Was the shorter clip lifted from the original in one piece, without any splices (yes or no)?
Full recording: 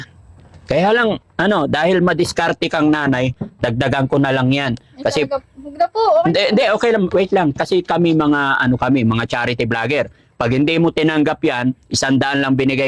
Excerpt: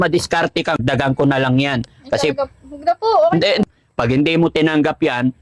no